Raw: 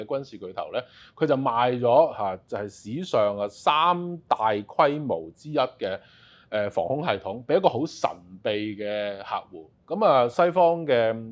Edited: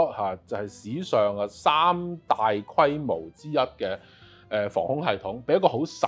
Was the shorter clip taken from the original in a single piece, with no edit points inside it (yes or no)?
yes